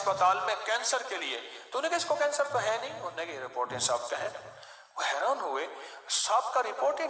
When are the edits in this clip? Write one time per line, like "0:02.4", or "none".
0:02.2